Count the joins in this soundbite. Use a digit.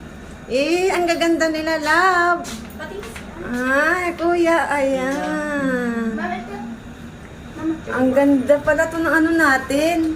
1